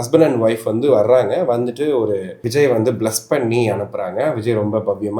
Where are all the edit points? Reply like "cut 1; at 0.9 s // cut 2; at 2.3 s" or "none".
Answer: cut 1; at 2.4 s